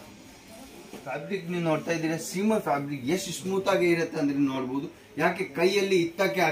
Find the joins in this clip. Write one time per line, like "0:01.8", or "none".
0:01.2

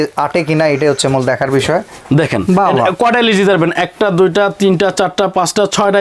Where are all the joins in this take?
none

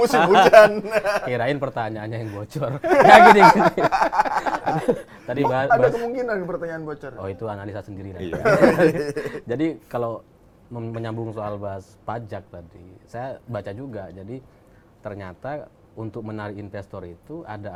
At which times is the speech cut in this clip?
none

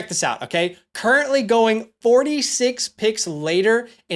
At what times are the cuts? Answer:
none

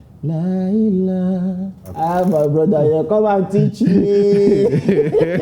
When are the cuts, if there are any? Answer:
0:01.9

